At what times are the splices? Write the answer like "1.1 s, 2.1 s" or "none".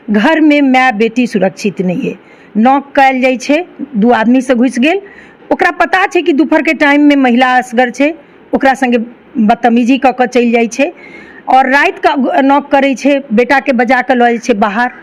none

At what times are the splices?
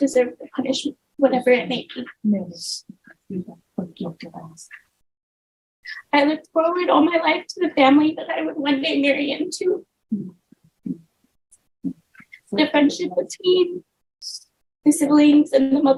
none

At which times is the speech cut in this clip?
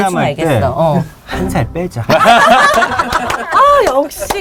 none

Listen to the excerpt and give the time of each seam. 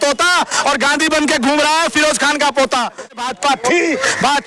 3.1 s

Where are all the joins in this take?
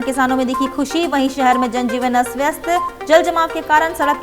none

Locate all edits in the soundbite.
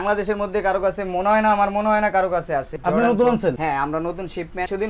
none

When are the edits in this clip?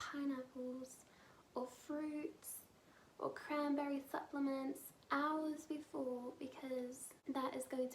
none

